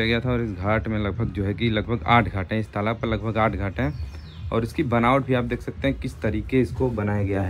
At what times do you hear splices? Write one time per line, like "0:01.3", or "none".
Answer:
none